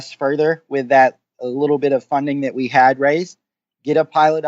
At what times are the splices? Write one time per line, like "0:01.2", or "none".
none